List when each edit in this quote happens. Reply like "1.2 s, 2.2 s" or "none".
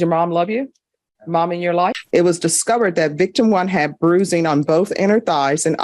2.0 s